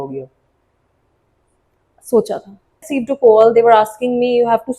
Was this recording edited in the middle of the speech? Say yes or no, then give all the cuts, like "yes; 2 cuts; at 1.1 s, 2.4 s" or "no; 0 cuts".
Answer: yes; 1 cut; at 2.9 s